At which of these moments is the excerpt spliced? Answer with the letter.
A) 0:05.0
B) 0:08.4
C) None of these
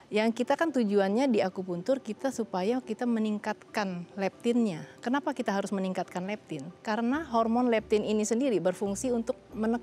C